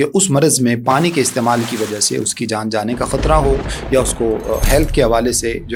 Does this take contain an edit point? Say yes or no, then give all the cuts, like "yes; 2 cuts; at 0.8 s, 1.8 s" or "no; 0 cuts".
no; 0 cuts